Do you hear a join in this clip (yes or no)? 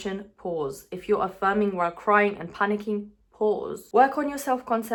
no